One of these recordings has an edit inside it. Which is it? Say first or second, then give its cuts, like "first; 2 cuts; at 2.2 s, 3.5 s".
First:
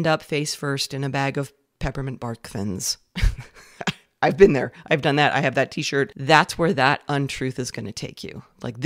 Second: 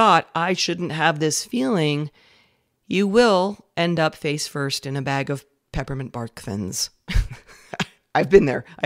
first; 1 cut; at 6.2 s